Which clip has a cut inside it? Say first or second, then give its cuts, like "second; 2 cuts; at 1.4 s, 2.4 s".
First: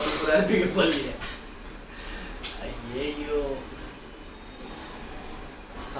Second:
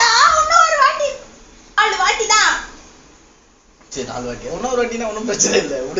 second; 1 cut; at 1.8 s